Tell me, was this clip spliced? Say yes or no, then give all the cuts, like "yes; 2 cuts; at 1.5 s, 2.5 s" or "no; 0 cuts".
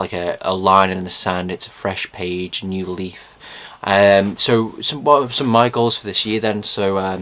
yes; 1 cut; at 1.7 s